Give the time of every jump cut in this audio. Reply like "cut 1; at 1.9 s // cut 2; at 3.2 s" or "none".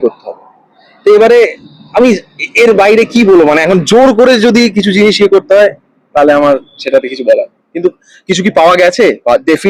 none